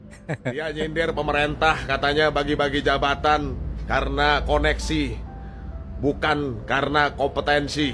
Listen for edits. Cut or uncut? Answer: cut